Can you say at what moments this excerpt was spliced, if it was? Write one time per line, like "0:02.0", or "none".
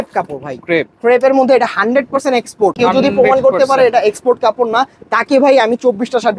0:02.8